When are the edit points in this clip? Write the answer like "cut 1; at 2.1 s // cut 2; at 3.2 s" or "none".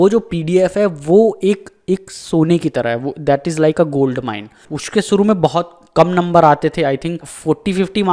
cut 1; at 4.7 s